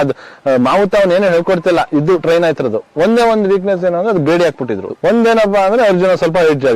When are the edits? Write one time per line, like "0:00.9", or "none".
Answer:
0:04.9